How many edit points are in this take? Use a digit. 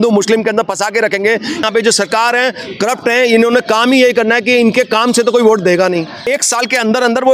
2